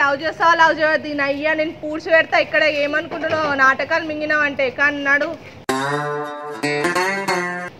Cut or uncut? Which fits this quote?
uncut